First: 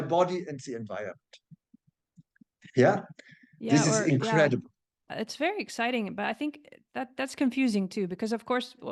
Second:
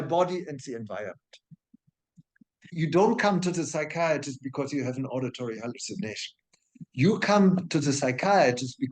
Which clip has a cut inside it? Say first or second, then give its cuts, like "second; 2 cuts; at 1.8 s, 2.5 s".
second; 1 cut; at 2.6 s